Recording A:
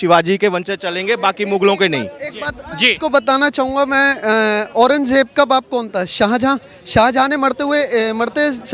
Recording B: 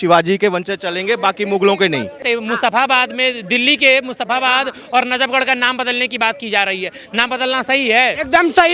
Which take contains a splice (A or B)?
B